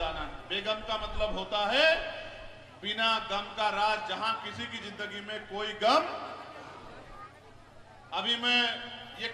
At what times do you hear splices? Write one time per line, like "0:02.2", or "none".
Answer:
none